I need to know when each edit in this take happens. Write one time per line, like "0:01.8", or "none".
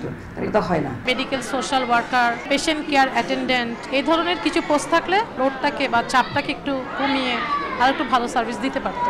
0:01.0
0:02.4
0:03.8
0:05.3